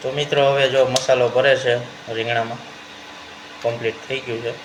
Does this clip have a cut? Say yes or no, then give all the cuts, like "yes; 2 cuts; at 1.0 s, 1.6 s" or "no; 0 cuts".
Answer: no; 0 cuts